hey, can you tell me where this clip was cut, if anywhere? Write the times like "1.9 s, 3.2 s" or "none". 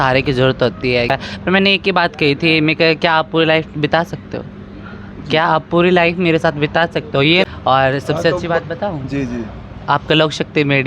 1.1 s, 7.4 s